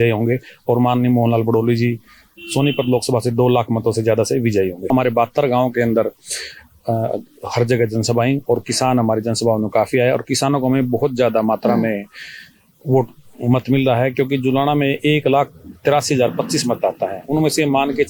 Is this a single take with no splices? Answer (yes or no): no